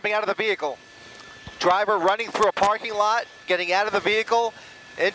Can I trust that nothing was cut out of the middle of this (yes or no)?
yes